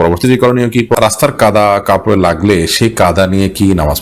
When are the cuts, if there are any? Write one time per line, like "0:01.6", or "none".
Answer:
0:00.9